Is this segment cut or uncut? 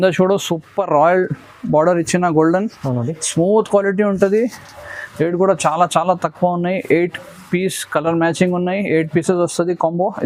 uncut